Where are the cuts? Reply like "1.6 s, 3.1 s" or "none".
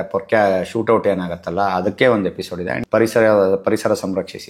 2.8 s